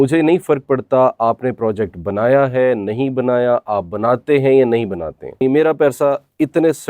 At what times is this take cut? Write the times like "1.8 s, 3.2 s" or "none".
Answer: 5.4 s

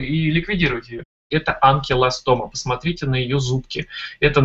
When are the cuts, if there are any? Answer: 1.2 s

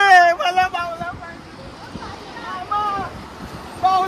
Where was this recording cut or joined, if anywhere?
none

